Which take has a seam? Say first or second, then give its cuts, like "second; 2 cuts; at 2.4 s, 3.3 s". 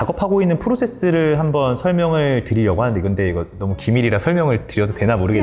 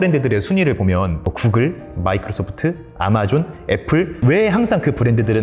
second; 2 cuts; at 1.2 s, 4.2 s